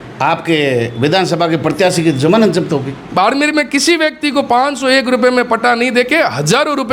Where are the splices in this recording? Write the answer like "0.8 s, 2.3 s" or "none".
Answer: 3.0 s